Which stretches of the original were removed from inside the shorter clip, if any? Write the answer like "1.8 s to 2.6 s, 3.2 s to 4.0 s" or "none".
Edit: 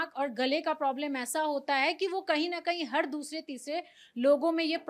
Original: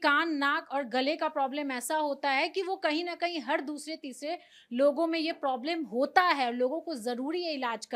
none